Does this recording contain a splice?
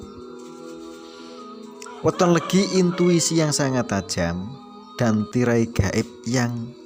no; 0 cuts

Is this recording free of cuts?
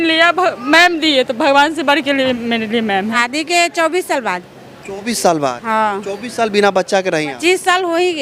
no; 1 cut; at 3.2 s

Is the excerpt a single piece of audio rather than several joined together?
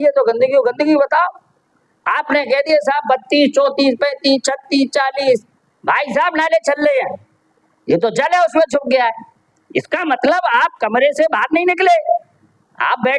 yes; 0 cuts

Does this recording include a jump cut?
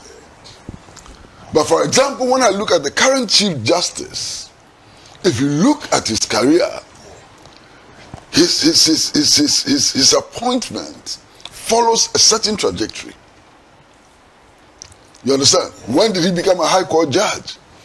no; 0 cuts

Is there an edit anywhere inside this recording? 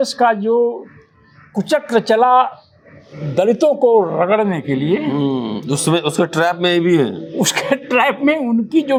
no; 0 cuts

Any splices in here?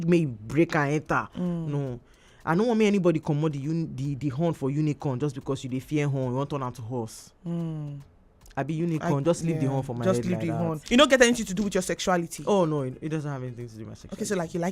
yes; 1 cut; at 10.8 s

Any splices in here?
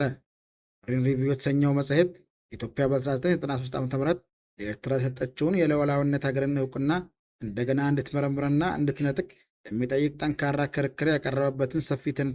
no; 0 cuts

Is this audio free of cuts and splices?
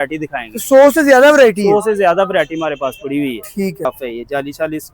no; 1 cut; at 3.9 s

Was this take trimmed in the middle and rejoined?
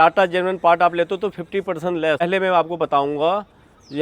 yes; 1 cut; at 2.2 s

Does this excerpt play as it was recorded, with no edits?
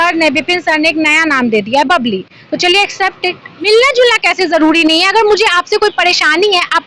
no; 1 cut; at 3.7 s

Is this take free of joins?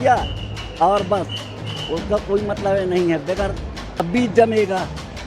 no; 1 cut; at 4.1 s

